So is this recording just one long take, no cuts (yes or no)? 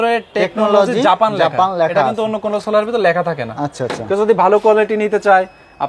yes